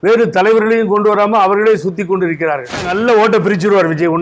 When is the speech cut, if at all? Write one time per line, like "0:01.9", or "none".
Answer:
0:02.9